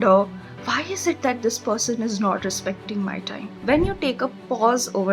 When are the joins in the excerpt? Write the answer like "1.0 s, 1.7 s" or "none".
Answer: 3.4 s